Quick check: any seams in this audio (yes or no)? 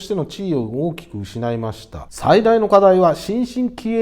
yes